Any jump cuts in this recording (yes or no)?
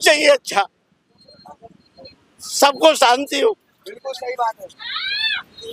no